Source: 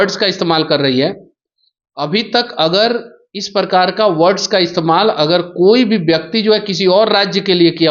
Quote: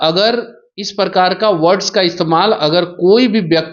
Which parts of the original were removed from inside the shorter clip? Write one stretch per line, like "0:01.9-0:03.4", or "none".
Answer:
none